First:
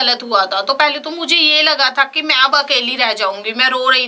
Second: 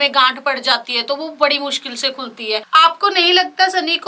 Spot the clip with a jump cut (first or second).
second